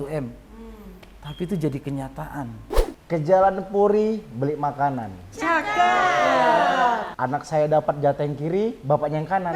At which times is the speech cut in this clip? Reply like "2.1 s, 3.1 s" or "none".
2.9 s, 7.1 s